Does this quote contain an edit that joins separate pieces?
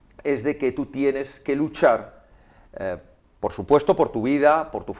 no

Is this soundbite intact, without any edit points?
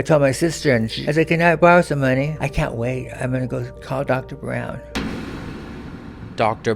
no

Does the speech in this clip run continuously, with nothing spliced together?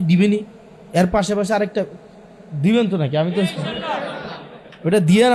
yes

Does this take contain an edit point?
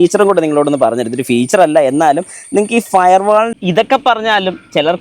yes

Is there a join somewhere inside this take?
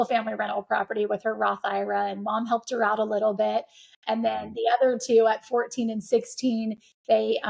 no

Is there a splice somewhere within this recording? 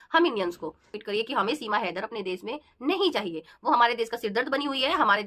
yes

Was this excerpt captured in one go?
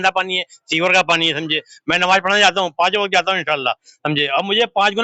yes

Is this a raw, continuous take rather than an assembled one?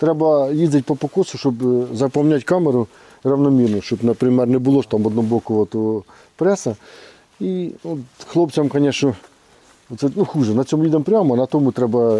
yes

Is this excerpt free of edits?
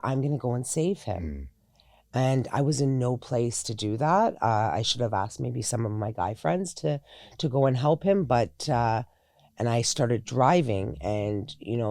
yes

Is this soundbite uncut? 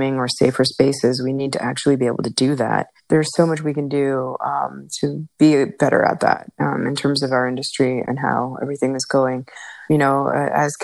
no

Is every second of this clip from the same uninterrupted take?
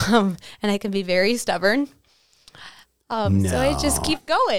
yes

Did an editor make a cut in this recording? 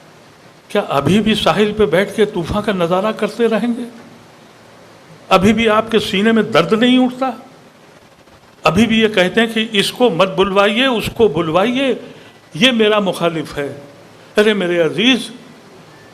no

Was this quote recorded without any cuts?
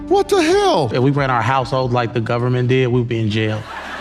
no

